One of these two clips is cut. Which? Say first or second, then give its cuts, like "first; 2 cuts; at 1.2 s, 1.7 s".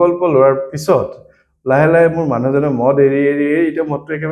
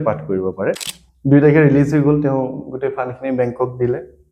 second; 1 cut; at 0.9 s